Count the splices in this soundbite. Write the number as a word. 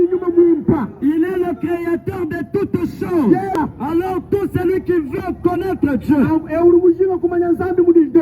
one